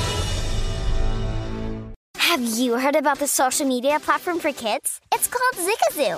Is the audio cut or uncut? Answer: cut